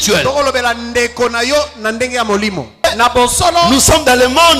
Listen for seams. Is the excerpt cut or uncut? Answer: cut